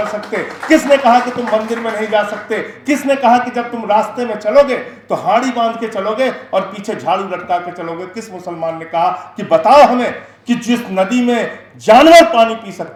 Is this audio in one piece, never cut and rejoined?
yes; 0 cuts

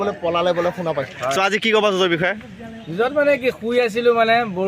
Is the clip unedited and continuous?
no; 1 cut; at 1.1 s

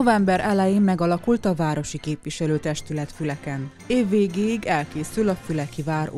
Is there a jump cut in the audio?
no; 0 cuts

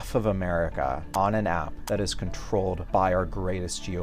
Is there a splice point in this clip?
yes; 3 cuts; at 1.0 s, 1.7 s, 2.8 s

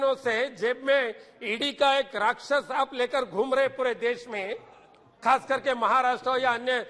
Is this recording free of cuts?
yes; 0 cuts

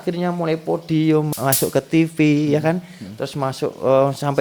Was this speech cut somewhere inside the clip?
yes; 1 cut; at 1.3 s

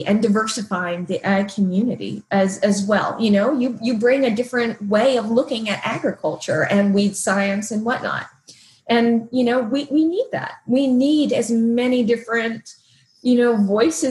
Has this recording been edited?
no; 0 cuts

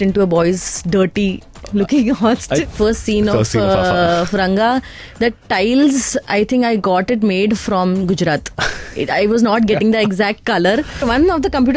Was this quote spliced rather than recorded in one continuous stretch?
yes; 2 cuts; at 2.7 s, 11.0 s

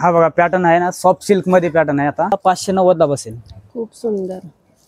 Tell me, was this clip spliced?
yes; 1 cut; at 2.3 s

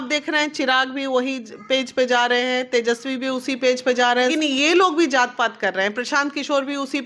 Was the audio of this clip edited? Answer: yes; 1 cut; at 4.3 s

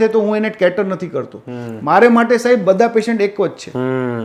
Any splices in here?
no; 0 cuts

